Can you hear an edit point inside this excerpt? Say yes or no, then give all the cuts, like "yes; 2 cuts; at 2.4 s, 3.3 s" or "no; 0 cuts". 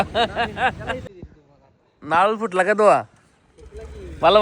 yes; 1 cut; at 1.1 s